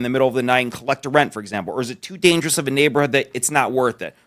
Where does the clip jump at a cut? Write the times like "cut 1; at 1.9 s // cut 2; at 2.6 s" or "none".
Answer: none